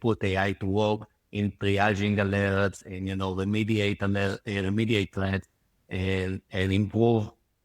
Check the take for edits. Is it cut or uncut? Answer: uncut